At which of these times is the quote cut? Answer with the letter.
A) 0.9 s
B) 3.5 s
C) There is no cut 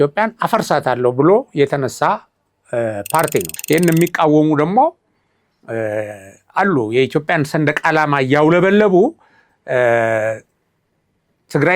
B